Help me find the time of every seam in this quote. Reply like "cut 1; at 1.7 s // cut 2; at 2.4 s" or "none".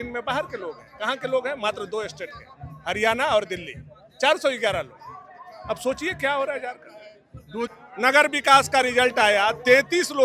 cut 1; at 7.7 s